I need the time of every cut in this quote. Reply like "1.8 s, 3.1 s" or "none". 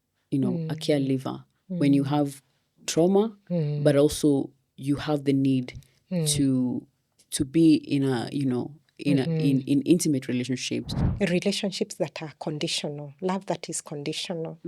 11.0 s